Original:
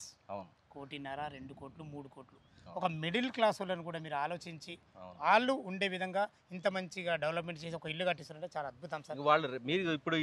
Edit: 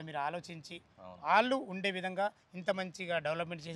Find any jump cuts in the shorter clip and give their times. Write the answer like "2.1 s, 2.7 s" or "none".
none

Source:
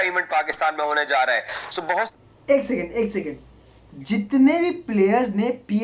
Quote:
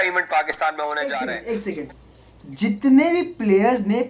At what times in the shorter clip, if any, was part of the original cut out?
1.1 s

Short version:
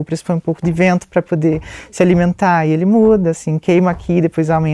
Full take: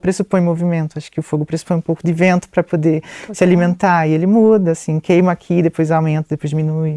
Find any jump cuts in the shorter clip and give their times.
none

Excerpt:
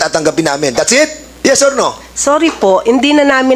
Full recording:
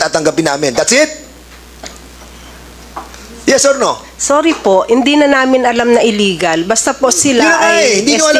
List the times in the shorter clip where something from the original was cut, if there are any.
1.2 s

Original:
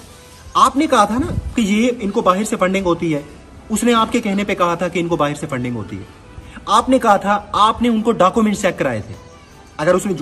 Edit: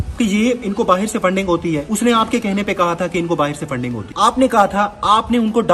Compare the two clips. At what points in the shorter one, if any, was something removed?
1.8 s, 4.0 s

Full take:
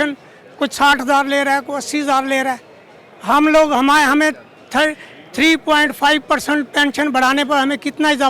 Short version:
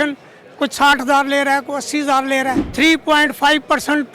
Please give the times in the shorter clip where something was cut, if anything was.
2.7 s

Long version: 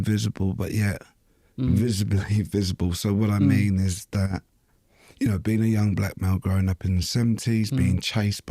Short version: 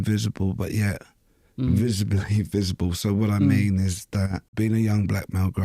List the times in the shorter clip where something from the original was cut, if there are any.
4.5 s

